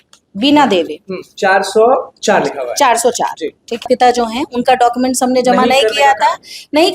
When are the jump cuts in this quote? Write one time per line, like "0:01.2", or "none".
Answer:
0:03.9